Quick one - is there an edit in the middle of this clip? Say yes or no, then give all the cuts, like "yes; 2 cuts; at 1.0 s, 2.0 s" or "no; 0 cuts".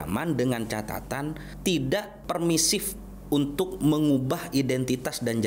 yes; 2 cuts; at 1.5 s, 2.1 s